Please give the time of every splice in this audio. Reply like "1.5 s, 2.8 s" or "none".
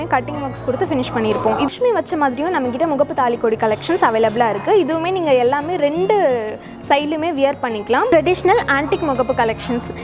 1.7 s, 8.1 s

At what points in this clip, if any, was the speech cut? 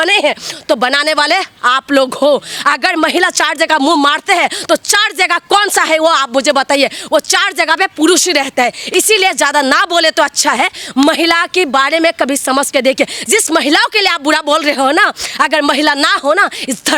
none

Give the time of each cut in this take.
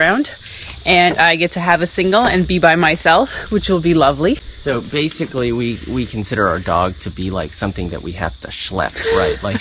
4.5 s

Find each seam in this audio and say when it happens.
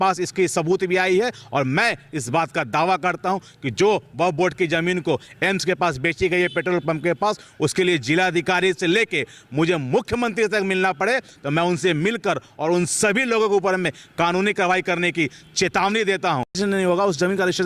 16.5 s

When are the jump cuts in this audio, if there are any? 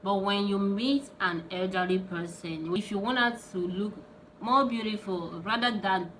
2.8 s

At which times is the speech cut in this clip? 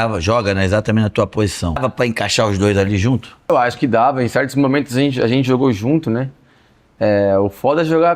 1.8 s, 3.5 s

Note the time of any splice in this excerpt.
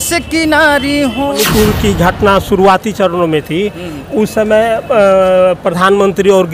1.4 s

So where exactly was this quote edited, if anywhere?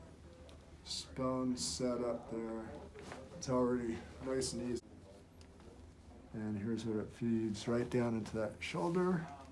4.8 s

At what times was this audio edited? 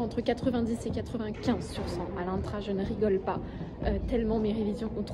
none

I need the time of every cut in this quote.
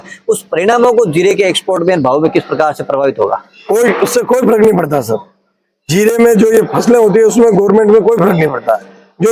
none

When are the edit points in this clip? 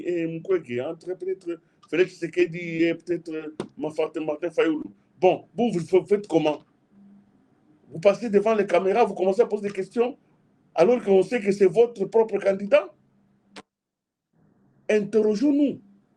none

